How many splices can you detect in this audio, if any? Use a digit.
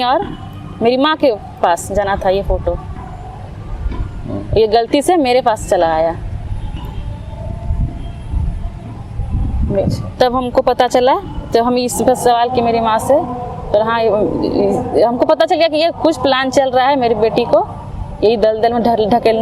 0